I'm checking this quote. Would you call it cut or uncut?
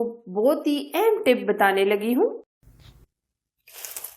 cut